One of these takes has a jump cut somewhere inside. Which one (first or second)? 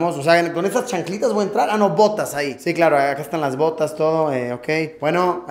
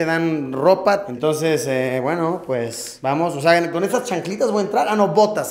second